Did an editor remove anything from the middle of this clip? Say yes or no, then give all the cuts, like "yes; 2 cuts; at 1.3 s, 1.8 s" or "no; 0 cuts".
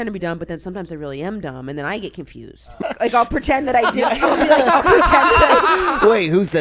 yes; 1 cut; at 2.7 s